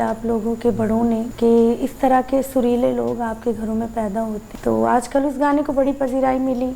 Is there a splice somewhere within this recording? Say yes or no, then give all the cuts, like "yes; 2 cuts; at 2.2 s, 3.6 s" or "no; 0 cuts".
yes; 2 cuts; at 1.3 s, 4.5 s